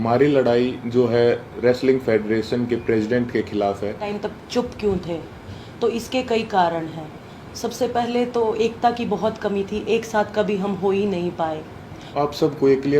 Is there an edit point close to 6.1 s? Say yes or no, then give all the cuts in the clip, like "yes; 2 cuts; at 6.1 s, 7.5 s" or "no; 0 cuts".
no; 2 cuts; at 4.1 s, 12.1 s